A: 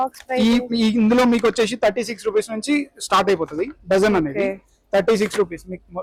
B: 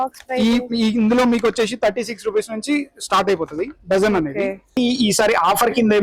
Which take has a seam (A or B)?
B